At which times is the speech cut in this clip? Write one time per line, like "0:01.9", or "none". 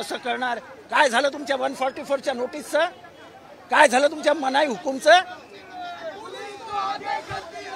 none